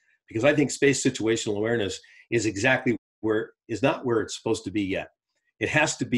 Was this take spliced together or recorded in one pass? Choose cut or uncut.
uncut